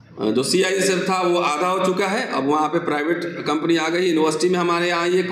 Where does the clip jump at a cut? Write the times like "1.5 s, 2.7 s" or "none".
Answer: none